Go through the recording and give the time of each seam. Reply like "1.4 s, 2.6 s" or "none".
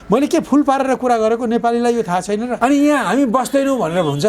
2.5 s